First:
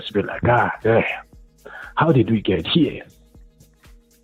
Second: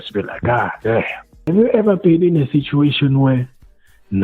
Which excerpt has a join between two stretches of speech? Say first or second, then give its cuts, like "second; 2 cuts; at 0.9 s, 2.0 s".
second; 1 cut; at 1.5 s